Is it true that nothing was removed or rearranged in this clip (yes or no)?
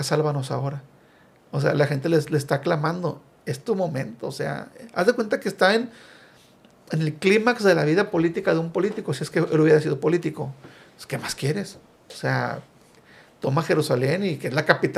yes